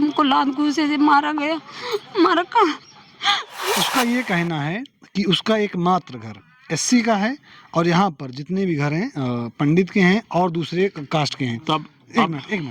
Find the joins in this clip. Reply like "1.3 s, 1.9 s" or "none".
3.7 s